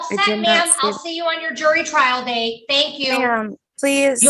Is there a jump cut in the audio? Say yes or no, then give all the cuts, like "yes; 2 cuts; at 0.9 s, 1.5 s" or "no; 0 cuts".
no; 0 cuts